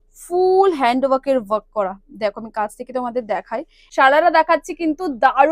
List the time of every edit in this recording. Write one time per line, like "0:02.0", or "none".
0:03.9